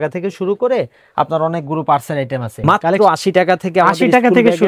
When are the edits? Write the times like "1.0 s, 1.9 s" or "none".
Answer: 2.6 s

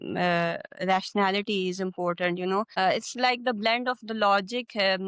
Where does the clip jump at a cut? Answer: 2.7 s

